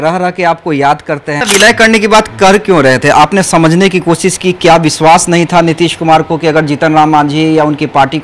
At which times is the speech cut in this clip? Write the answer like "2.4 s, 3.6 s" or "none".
1.4 s